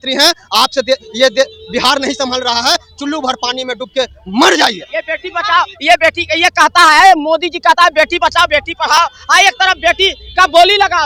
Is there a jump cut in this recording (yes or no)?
no